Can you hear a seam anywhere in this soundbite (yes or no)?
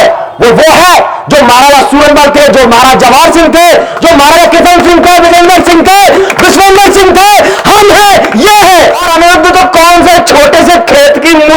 yes